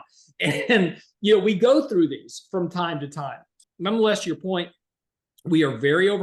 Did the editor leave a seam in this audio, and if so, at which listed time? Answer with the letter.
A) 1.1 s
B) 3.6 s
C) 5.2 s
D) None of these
B